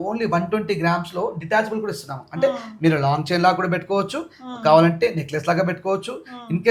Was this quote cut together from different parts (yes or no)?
no